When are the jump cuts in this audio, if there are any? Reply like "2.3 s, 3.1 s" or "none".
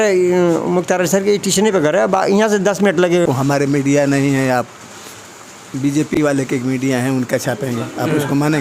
3.3 s